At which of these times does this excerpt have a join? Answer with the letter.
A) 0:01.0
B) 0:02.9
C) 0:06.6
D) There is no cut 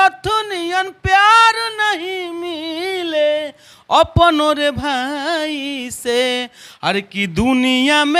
D